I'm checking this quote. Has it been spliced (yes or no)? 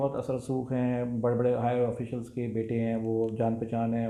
no